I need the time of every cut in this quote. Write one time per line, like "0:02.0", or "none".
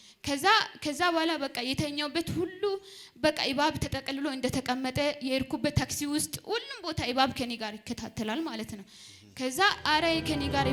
none